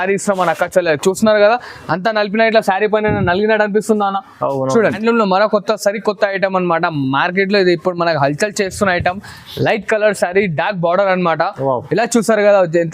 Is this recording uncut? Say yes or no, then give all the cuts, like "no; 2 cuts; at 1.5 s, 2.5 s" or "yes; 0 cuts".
no; 1 cut; at 5.0 s